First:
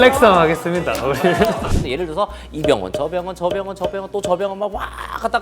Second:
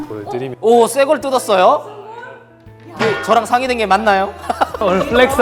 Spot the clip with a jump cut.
first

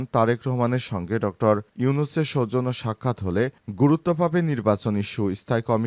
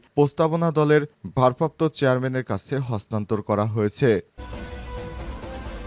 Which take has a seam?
second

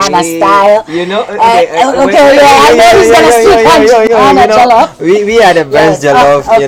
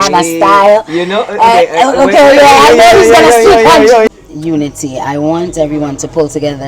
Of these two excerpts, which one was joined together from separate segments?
second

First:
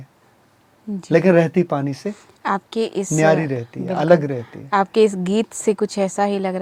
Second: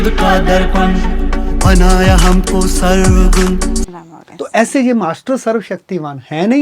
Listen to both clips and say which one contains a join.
second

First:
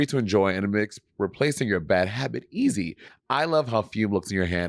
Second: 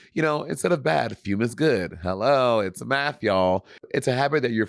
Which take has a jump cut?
first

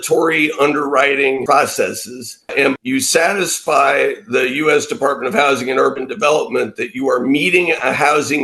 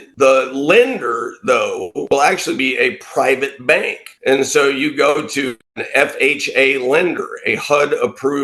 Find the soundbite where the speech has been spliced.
first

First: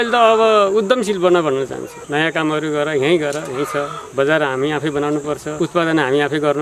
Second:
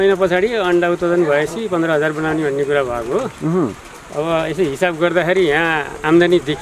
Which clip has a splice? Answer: first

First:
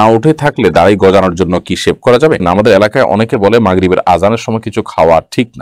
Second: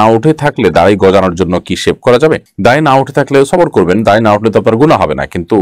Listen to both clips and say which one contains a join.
first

